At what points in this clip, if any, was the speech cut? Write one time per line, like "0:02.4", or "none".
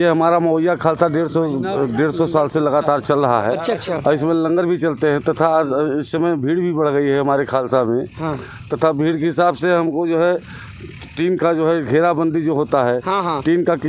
none